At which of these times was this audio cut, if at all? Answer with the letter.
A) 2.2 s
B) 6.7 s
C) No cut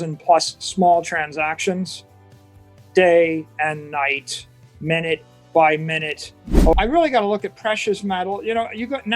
B